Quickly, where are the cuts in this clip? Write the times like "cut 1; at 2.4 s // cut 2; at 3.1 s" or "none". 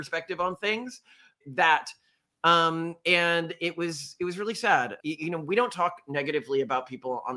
cut 1; at 1.3 s // cut 2; at 5.0 s